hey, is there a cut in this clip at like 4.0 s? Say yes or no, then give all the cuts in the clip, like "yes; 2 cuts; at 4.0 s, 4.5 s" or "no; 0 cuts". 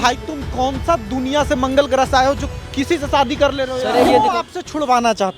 yes; 1 cut; at 4.0 s